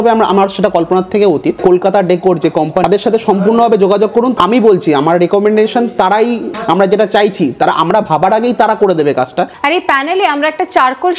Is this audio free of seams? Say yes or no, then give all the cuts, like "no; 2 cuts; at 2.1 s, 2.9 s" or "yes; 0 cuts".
no; 5 cuts; at 1.6 s, 2.8 s, 4.3 s, 6.6 s, 9.6 s